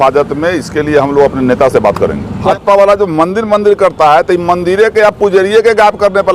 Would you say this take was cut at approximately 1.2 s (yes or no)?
no